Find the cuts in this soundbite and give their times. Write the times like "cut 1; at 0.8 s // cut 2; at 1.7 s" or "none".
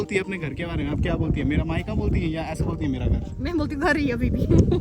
none

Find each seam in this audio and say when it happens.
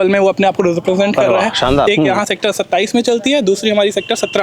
cut 1; at 1.8 s

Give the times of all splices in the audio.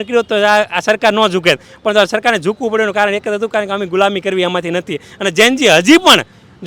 none

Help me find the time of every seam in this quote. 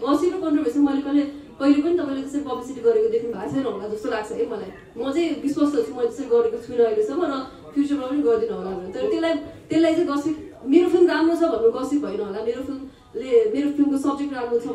none

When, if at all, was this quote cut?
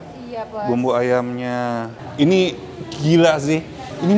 cut 1; at 2.0 s

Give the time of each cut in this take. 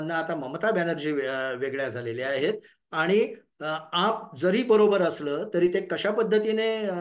none

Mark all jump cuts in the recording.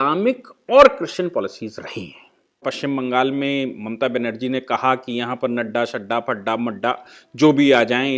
cut 1; at 2.6 s

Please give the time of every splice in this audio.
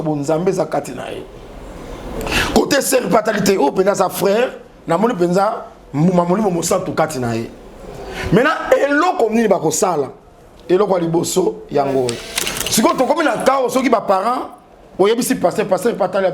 cut 1; at 12.3 s

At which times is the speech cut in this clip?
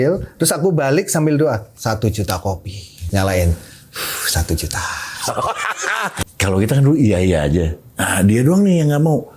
cut 1; at 2.9 s // cut 2; at 6.2 s

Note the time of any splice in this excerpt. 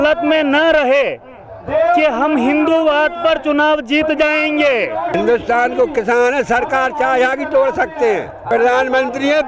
cut 1; at 5.1 s // cut 2; at 8.5 s

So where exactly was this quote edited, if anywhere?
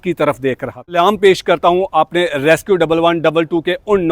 cut 1; at 0.9 s

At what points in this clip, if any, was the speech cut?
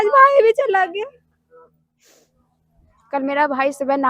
cut 1; at 2.2 s

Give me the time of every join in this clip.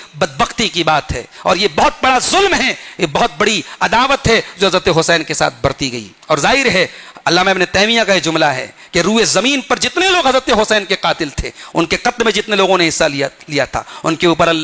none

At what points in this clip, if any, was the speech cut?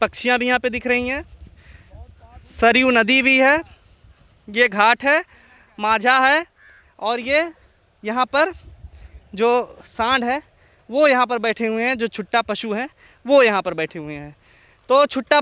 none

